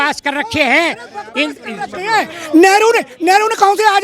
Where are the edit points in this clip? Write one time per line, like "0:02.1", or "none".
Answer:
none